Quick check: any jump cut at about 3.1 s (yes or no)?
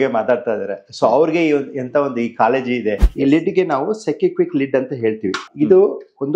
yes